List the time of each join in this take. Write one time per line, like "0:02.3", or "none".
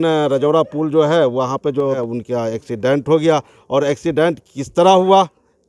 0:02.0